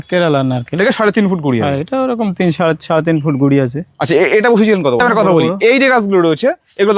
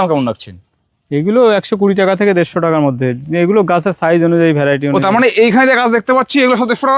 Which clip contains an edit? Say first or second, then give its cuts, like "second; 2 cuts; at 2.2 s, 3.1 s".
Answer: first; 1 cut; at 5.0 s